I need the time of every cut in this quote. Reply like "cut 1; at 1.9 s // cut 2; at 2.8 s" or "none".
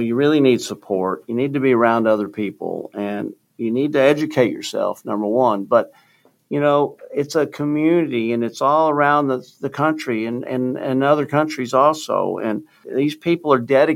cut 1; at 12.8 s